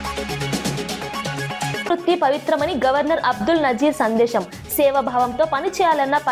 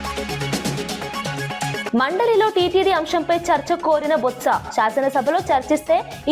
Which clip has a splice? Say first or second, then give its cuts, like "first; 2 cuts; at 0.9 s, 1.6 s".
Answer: second; 1 cut; at 1.8 s